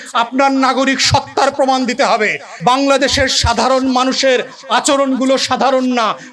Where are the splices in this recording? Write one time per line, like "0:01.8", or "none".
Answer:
0:02.5